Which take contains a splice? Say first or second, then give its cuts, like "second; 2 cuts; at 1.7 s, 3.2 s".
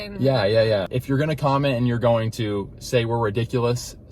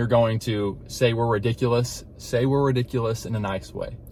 first; 1 cut; at 0.9 s